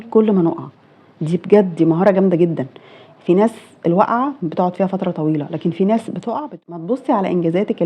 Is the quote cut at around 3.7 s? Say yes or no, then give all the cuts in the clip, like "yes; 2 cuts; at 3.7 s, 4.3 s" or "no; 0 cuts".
no; 1 cut; at 6.6 s